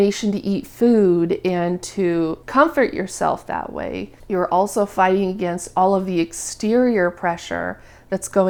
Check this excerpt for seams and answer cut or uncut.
uncut